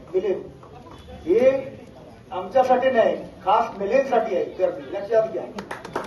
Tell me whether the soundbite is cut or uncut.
uncut